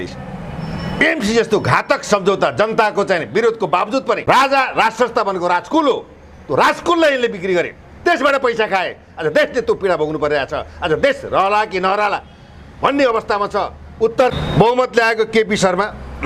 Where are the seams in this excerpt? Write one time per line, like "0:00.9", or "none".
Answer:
0:04.2
0:14.3